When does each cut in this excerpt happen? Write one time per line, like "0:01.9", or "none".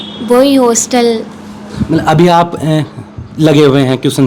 none